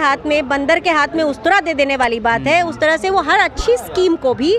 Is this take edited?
no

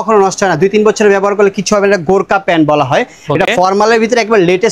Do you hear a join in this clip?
no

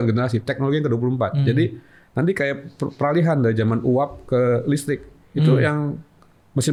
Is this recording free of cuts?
yes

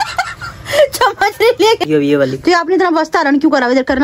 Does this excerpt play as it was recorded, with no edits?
no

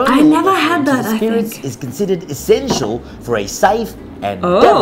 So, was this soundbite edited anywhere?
no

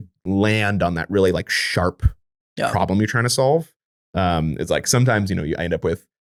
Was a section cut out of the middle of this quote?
no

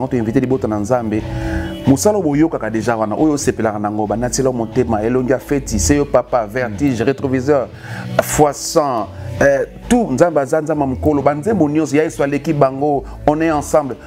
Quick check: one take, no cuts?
yes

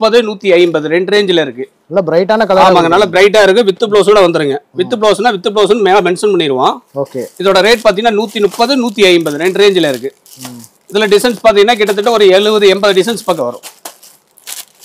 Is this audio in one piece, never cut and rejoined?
yes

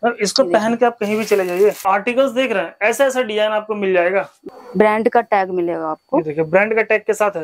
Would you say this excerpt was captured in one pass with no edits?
no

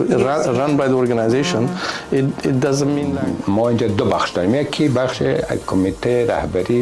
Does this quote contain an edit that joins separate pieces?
yes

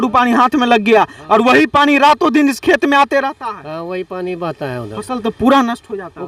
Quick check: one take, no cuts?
yes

